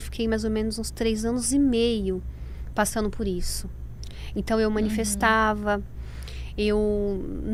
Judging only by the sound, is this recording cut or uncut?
uncut